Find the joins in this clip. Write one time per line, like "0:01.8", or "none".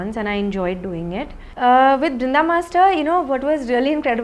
0:01.4